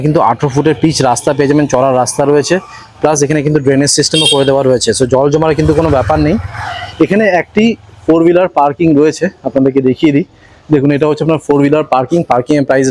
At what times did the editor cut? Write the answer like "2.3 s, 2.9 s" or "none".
none